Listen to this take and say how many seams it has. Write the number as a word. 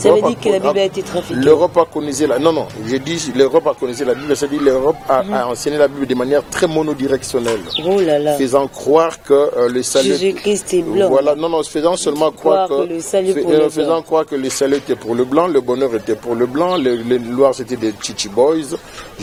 zero